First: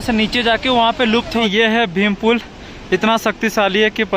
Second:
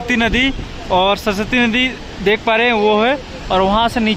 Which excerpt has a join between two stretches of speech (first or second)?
first